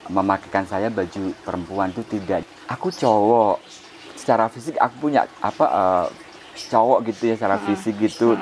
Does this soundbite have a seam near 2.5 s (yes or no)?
yes